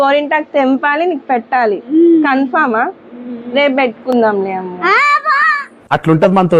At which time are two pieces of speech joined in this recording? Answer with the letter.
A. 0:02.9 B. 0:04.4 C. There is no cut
C